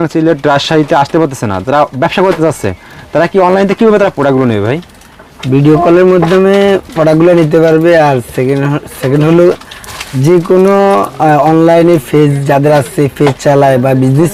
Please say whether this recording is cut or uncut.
uncut